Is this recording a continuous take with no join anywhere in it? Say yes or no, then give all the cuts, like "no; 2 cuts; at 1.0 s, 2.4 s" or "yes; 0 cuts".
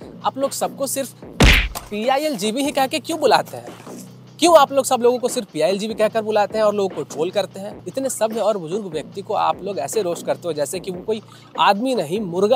no; 1 cut; at 7.9 s